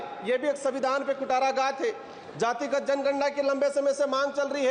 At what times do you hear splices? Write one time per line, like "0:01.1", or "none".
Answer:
none